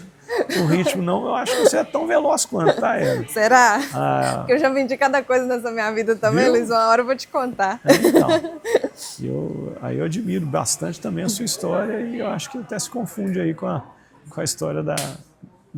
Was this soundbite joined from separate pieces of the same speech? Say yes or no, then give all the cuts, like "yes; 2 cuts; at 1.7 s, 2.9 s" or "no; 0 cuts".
no; 0 cuts